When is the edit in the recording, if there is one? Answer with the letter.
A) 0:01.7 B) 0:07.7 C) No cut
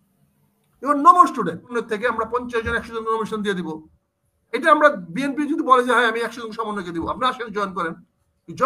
A